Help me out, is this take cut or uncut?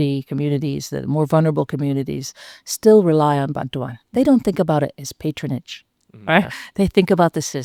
uncut